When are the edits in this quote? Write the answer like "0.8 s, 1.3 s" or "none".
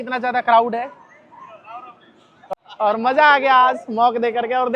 2.3 s